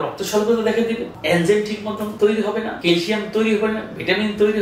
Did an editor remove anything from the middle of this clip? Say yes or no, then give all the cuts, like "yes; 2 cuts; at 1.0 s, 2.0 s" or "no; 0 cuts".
yes; 3 cuts; at 1.1 s, 2.1 s, 2.8 s